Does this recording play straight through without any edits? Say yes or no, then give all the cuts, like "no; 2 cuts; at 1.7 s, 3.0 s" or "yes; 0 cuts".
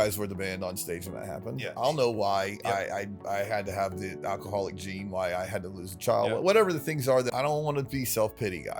no; 1 cut; at 7.3 s